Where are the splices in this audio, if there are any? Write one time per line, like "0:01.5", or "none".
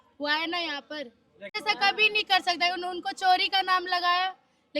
0:01.5